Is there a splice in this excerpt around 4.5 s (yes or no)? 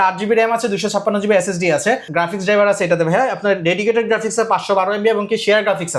no